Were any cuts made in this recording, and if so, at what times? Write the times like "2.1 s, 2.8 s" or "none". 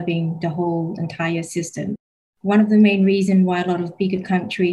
2.3 s